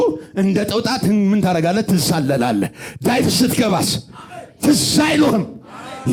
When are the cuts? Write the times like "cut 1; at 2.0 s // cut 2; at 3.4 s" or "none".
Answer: none